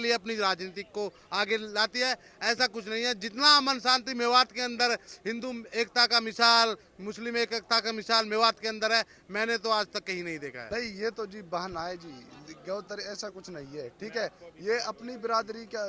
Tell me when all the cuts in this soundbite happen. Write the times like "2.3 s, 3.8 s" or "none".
10.6 s